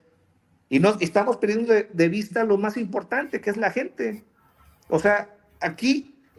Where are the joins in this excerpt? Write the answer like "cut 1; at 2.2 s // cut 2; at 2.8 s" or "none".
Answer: none